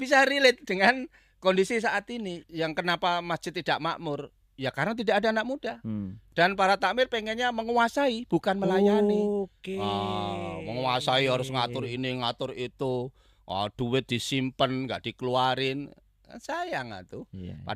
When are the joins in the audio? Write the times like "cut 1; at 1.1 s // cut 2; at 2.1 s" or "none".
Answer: cut 1; at 2.4 s